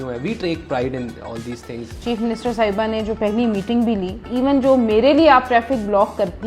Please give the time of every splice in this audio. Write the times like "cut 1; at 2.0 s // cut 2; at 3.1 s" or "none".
cut 1; at 2.0 s // cut 2; at 4.2 s